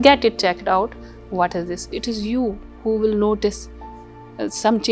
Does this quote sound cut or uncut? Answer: cut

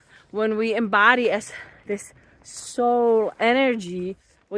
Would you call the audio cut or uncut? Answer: uncut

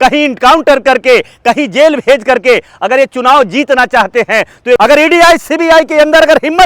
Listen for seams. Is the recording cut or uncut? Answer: cut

